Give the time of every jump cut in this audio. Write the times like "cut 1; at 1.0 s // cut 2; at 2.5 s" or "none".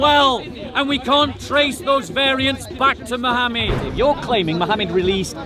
cut 1; at 3.8 s